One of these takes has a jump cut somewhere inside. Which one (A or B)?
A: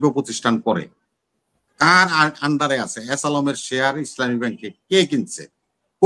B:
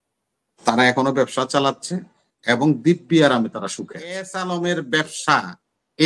B